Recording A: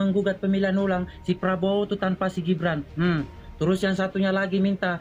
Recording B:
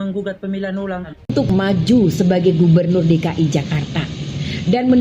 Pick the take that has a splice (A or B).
B